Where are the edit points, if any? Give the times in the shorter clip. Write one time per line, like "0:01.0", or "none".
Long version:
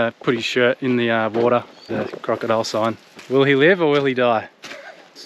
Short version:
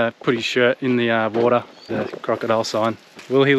none